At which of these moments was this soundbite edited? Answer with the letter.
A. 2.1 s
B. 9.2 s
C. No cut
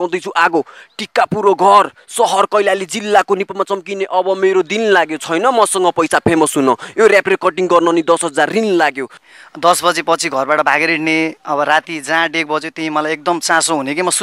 B